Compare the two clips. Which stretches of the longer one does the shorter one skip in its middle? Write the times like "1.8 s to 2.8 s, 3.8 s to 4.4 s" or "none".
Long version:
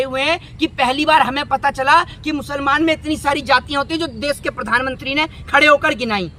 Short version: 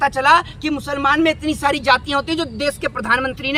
none